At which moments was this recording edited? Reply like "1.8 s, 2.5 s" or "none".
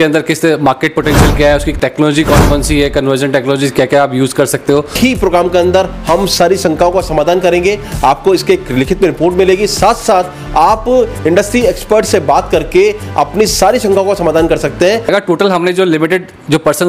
4.9 s, 15.1 s